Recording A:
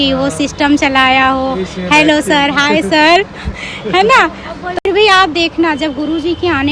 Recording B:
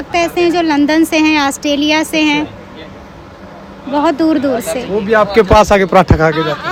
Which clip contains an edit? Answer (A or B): A